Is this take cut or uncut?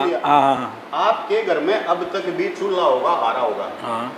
uncut